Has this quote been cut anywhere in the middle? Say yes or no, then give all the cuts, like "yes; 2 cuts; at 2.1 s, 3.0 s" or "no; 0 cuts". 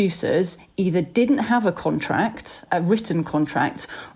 yes; 1 cut; at 2.5 s